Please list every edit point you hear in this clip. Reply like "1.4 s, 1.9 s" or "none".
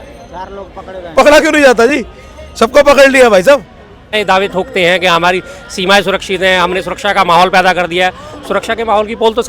4.1 s